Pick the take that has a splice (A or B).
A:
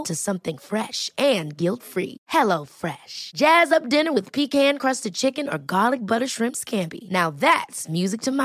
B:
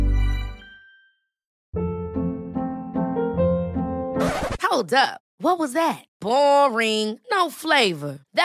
B